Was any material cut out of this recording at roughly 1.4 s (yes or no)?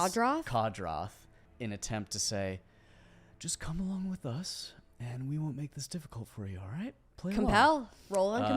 yes